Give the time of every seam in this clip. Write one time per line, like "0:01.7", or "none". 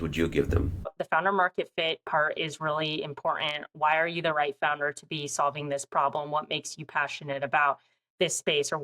0:00.9